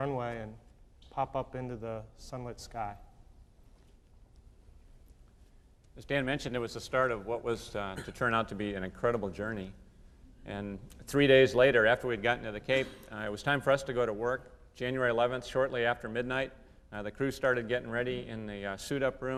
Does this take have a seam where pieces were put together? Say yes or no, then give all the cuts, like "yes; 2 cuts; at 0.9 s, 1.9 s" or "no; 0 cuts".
no; 0 cuts